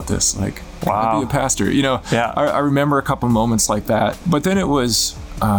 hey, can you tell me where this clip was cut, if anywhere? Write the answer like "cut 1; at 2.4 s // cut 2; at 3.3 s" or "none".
cut 1; at 4.2 s